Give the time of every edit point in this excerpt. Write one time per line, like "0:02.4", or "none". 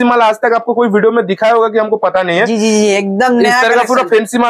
none